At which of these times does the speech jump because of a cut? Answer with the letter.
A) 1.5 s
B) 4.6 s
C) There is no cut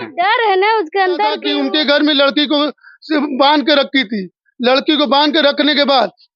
A